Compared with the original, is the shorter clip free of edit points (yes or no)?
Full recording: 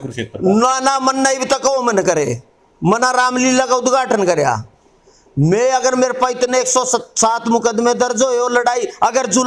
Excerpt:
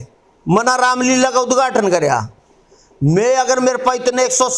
yes